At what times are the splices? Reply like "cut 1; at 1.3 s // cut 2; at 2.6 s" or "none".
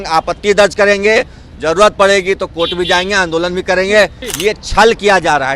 cut 1; at 4.2 s